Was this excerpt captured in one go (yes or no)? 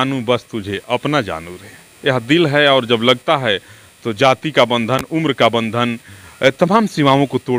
yes